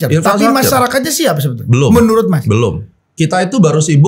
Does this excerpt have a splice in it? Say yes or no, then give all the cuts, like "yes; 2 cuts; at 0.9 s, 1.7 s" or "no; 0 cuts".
yes; 1 cut; at 3.1 s